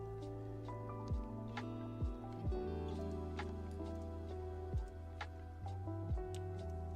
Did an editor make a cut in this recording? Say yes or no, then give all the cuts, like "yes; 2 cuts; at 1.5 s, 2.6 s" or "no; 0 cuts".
yes; 1 cut; at 2.3 s